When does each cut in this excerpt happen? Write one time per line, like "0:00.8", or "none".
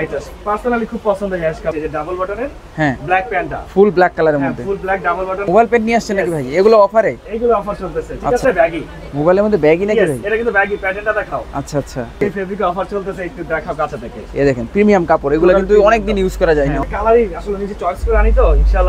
0:01.7
0:05.4
0:08.4
0:12.2
0:16.8